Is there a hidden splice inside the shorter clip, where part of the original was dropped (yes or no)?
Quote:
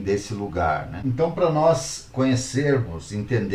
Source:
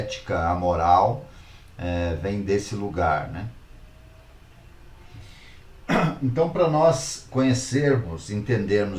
yes